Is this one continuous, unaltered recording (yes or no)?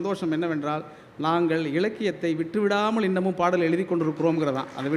yes